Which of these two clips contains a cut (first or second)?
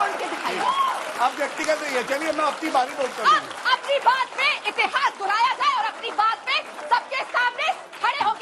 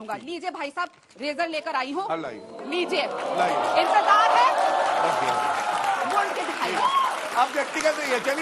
second